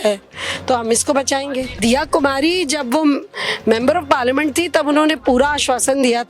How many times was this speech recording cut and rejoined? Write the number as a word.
one